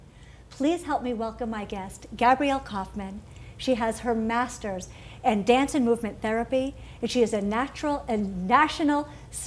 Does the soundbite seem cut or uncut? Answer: cut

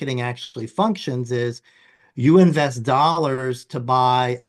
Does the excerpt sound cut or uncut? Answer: uncut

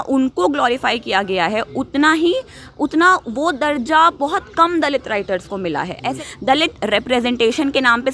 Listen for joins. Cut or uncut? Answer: cut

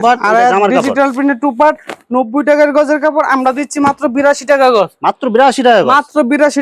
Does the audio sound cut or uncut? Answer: uncut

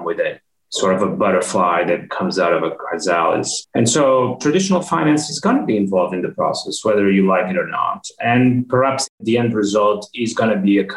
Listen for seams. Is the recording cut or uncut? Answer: cut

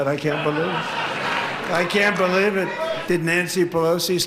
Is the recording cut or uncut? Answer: cut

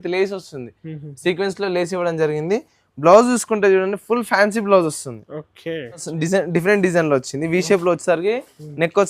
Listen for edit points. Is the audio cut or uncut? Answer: cut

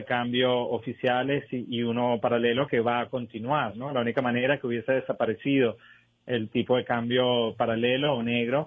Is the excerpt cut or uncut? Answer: cut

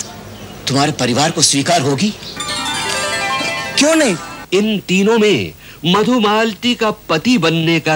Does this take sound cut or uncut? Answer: cut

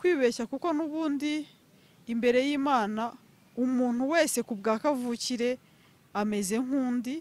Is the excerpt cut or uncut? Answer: uncut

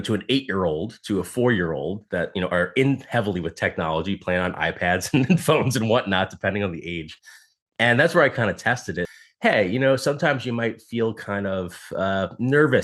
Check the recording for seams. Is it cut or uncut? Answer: cut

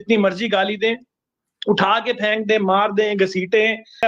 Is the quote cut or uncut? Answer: uncut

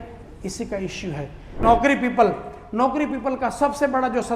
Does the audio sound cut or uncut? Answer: cut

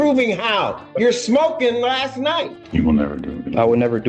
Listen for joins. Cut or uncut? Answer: cut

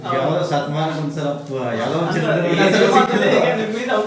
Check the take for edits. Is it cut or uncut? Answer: uncut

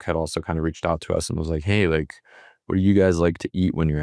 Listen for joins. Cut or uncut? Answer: uncut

